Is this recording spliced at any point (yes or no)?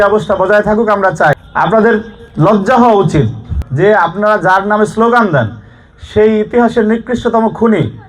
yes